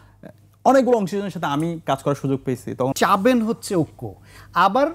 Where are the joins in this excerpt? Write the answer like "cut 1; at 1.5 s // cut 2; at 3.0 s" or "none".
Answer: cut 1; at 2.9 s